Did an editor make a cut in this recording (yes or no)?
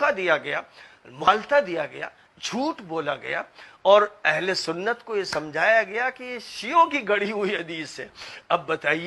yes